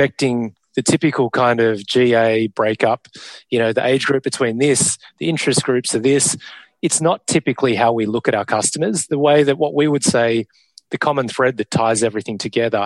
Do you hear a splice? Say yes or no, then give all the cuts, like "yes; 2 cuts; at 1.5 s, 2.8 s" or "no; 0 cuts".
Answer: no; 0 cuts